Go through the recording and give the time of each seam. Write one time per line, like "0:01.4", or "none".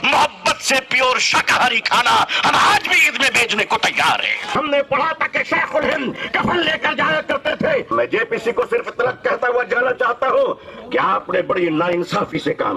0:04.4
0:07.9